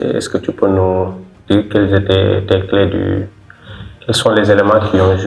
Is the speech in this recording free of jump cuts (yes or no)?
yes